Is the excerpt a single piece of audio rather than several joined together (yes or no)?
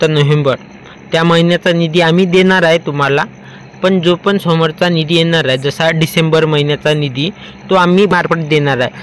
no